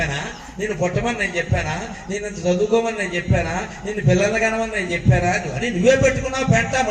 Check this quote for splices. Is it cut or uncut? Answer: uncut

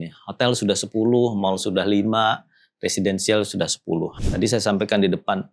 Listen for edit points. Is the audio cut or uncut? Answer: cut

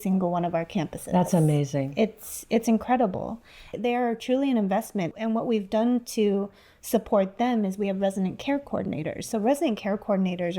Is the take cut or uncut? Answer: cut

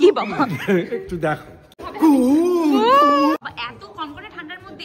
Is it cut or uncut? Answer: cut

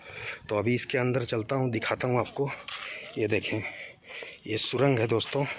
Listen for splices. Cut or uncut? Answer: uncut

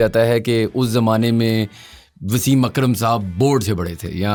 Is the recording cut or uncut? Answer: uncut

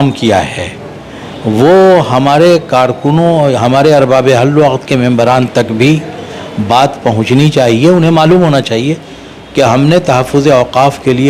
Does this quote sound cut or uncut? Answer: uncut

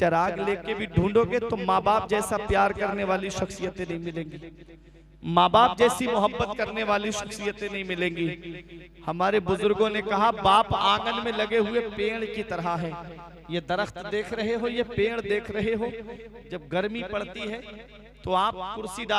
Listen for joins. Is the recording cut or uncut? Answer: uncut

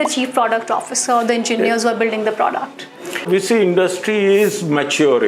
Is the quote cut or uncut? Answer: cut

